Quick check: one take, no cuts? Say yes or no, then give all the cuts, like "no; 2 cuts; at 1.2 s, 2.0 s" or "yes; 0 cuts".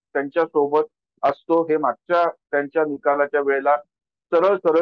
yes; 0 cuts